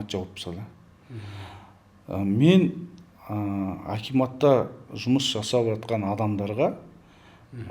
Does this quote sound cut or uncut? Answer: uncut